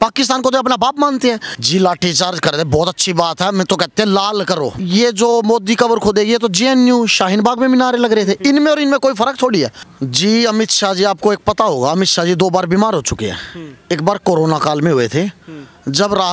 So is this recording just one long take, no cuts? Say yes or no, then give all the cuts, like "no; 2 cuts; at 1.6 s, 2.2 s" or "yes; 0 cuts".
no; 3 cuts; at 1.5 s, 4.8 s, 9.8 s